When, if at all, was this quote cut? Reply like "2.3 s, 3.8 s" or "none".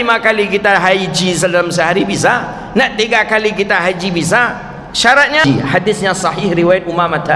5.4 s